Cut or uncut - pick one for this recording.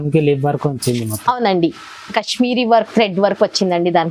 uncut